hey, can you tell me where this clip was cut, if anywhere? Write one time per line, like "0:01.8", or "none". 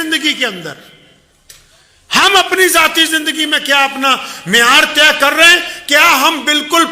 none